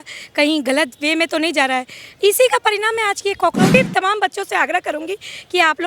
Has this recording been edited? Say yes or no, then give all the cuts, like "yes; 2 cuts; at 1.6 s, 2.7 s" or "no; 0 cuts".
yes; 1 cut; at 3.7 s